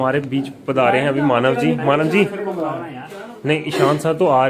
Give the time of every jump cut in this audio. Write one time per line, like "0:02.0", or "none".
none